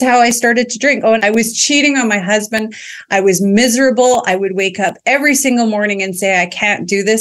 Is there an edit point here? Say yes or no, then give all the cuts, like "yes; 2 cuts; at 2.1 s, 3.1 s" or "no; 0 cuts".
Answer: yes; 1 cut; at 1.2 s